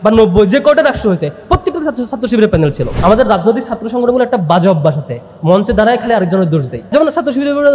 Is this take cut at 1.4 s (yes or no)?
no